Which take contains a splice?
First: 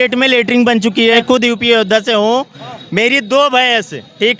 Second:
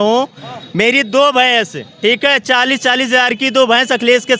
first; 1 cut; at 1.2 s

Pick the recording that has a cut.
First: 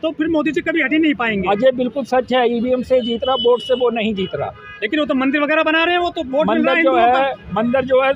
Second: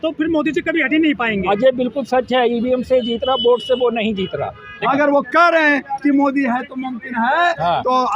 second; 1 cut; at 4.7 s

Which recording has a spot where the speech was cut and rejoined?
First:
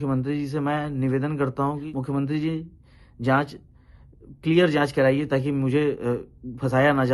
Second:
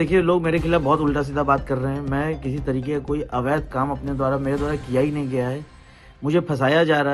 first; 1 cut; at 1.8 s

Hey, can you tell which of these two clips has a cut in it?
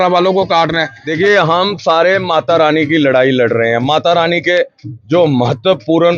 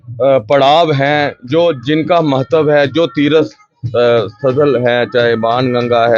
first; 1 cut; at 1.0 s

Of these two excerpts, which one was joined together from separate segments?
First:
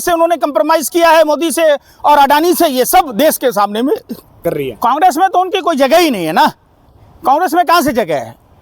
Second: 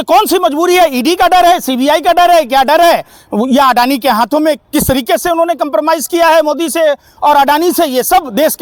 first; 1 cut; at 4.4 s

